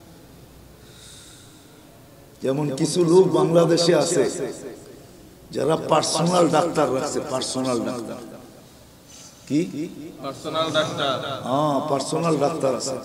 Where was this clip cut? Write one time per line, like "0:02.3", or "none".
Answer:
none